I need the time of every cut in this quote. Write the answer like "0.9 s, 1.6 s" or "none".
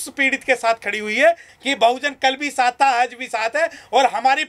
1.5 s